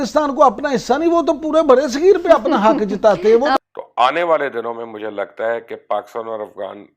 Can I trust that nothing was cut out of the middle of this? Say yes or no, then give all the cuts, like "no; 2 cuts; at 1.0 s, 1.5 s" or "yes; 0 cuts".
no; 1 cut; at 3.6 s